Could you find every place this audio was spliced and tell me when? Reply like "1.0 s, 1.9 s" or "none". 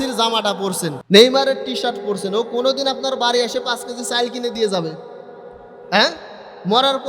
0.9 s